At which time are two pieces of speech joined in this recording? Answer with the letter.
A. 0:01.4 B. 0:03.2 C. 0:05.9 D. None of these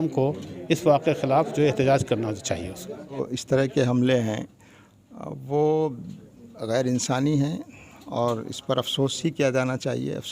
B